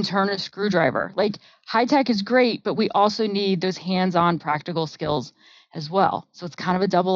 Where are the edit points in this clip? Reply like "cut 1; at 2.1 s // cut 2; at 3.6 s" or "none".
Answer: none